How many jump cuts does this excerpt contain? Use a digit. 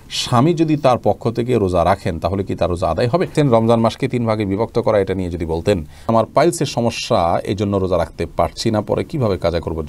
2